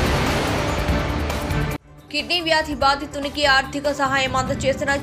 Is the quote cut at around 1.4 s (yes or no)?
yes